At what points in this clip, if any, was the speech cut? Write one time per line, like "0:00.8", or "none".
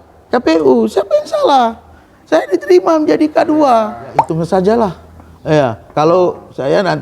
0:04.3